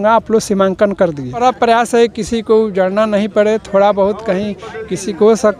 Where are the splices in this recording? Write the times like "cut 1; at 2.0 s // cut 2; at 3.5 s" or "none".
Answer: cut 1; at 1.4 s